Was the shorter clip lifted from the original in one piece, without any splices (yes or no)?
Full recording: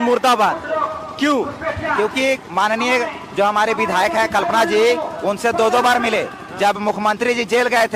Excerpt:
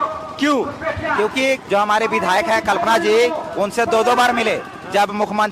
no